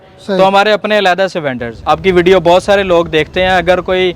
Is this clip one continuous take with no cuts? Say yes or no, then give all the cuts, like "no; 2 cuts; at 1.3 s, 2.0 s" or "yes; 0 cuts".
no; 1 cut; at 1.7 s